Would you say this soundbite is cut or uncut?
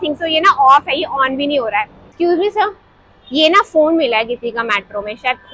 cut